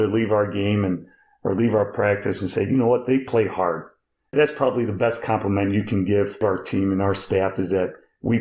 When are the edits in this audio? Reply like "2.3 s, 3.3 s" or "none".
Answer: 4.3 s, 6.4 s

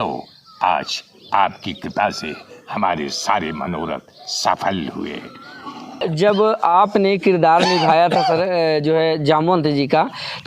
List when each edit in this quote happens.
6.0 s

